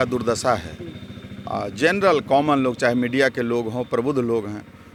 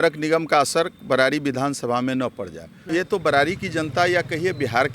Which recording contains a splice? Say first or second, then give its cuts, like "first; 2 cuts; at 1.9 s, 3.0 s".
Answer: second; 1 cut; at 2.8 s